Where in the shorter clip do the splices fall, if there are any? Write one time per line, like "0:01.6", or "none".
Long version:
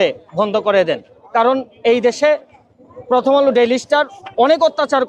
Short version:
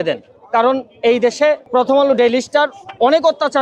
0:01.6